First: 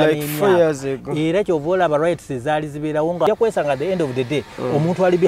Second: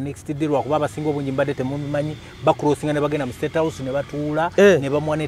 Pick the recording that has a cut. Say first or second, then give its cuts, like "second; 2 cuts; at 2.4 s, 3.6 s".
first; 1 cut; at 3.3 s